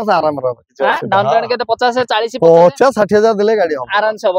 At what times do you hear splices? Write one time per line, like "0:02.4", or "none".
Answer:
none